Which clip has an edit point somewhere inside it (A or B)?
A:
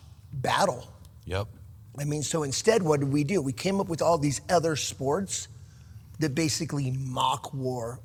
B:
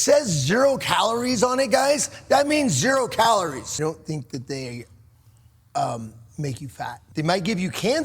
B